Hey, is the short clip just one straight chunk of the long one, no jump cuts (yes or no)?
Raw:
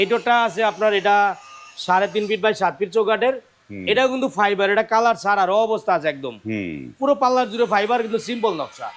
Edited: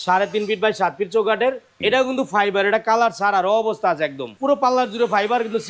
no